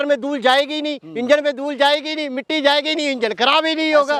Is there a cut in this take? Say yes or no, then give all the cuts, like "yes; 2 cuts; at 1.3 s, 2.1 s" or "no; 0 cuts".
no; 0 cuts